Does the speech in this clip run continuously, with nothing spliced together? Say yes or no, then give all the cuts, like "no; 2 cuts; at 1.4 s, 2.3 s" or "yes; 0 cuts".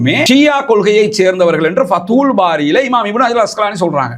yes; 0 cuts